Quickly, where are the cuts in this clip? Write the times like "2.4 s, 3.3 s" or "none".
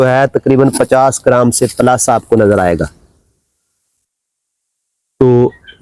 none